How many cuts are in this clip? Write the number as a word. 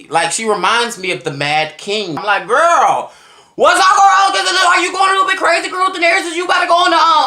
one